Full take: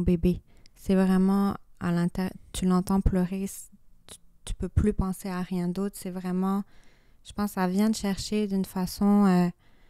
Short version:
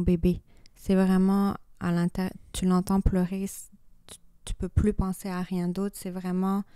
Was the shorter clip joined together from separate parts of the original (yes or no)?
no